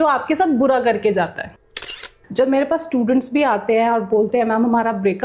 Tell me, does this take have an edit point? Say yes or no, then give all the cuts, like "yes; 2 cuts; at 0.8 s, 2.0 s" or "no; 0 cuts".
yes; 1 cut; at 1.8 s